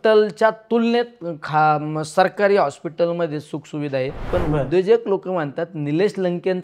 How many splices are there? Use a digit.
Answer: 1